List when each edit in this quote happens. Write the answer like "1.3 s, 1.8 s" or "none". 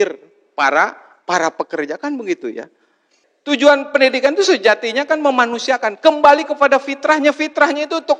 3.3 s